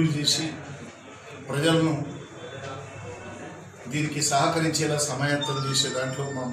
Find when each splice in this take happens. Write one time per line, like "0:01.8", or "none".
none